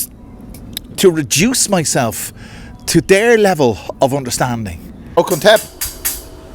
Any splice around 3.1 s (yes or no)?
no